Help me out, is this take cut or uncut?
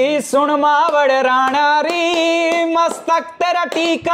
uncut